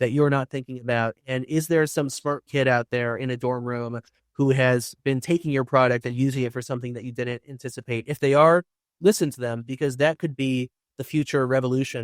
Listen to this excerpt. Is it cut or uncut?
uncut